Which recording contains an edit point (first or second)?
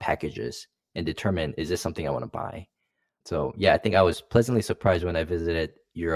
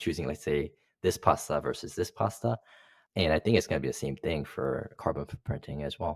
second